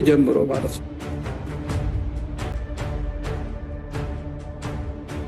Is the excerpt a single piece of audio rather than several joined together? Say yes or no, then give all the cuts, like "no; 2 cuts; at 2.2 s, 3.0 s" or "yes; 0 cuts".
no; 1 cut; at 2.5 s